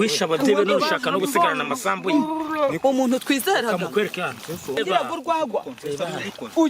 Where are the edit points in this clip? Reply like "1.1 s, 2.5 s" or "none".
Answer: 4.8 s